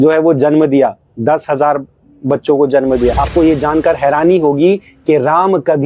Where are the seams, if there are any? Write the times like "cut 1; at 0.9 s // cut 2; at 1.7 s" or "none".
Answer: cut 1; at 3.1 s